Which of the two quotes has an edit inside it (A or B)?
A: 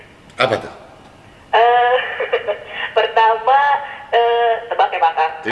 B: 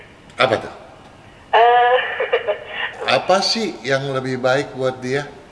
B